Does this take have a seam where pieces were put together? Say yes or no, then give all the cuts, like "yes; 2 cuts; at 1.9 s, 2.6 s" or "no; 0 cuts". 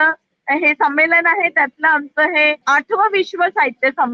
yes; 1 cut; at 2.6 s